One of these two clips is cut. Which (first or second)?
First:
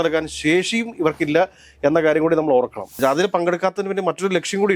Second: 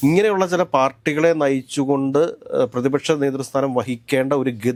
first